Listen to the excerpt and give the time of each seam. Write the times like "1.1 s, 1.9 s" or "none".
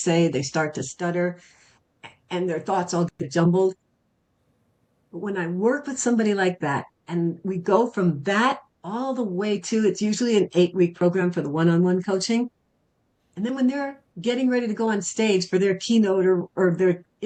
none